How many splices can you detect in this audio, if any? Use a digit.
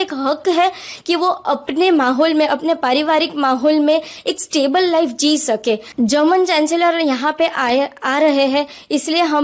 1